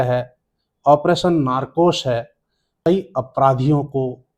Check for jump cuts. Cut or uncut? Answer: cut